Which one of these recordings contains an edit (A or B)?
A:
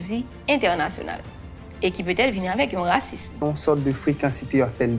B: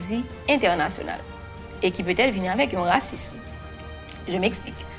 A